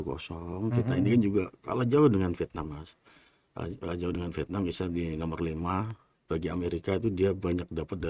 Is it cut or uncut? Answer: uncut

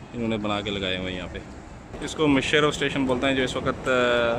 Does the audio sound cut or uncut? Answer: cut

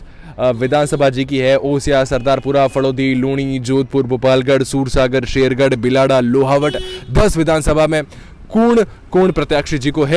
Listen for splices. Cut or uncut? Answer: uncut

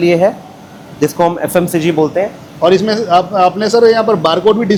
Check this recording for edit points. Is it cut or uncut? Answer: uncut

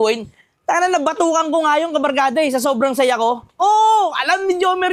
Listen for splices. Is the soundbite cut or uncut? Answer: uncut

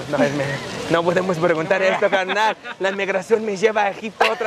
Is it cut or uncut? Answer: uncut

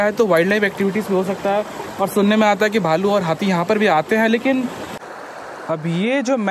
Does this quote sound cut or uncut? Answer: cut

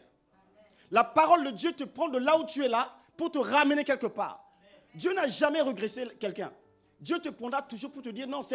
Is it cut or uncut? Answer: uncut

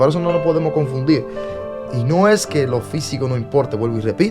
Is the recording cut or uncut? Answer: uncut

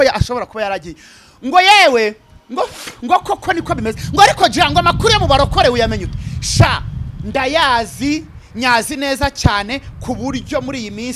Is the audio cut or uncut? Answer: uncut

